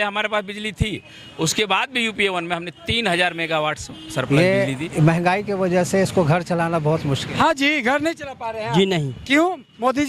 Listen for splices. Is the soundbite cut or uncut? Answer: cut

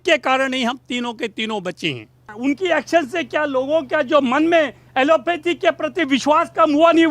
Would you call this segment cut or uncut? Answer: cut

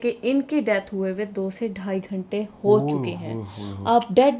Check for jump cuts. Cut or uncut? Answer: uncut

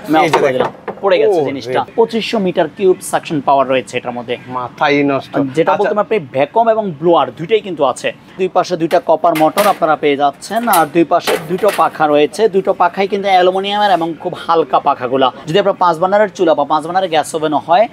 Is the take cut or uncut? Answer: cut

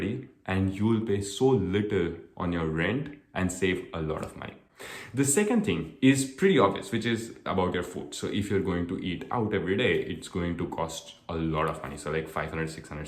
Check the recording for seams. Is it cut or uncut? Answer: uncut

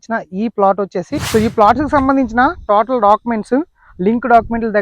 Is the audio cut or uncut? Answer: cut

